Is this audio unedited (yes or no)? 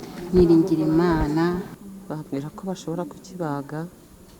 no